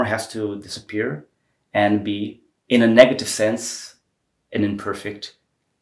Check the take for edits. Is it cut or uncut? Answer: uncut